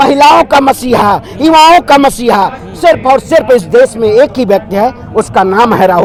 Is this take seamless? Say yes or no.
yes